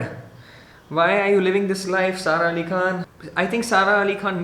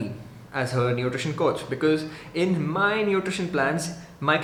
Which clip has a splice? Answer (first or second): first